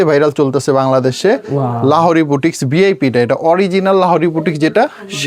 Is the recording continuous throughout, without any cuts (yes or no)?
yes